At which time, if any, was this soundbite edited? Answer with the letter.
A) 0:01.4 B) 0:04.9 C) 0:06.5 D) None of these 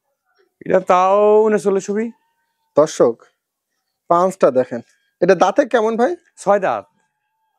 D